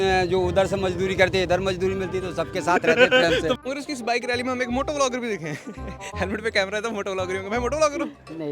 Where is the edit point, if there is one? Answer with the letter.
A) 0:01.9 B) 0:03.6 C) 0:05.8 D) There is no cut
B